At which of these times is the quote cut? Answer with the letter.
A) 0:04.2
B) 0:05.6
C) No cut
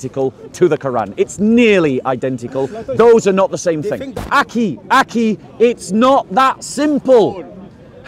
A